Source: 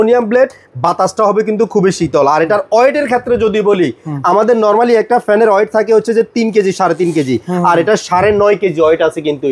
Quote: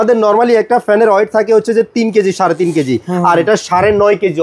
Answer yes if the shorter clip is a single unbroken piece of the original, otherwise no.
yes